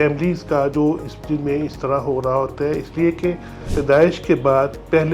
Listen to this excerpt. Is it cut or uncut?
cut